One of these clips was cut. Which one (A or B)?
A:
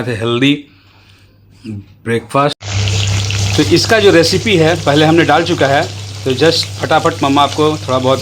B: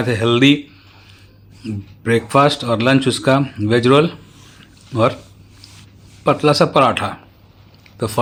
A